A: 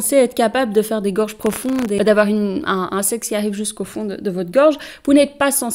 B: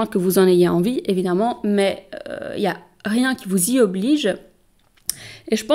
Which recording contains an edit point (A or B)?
A